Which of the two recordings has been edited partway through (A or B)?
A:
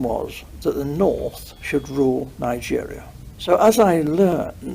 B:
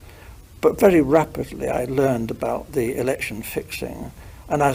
A